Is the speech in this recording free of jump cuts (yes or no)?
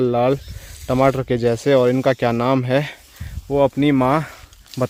yes